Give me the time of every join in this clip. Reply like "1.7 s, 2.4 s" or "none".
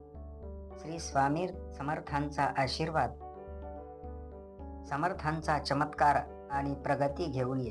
1.0 s